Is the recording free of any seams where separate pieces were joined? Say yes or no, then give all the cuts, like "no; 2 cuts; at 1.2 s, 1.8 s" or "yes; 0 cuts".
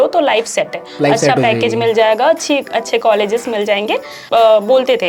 no; 1 cut; at 4.2 s